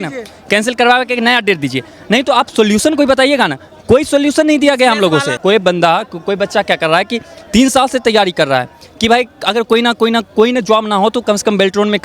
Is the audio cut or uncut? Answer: cut